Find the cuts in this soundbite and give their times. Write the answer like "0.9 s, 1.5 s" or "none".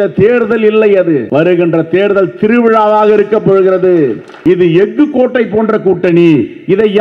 1.2 s, 4.3 s